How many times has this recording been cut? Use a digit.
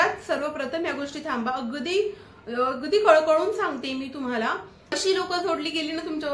1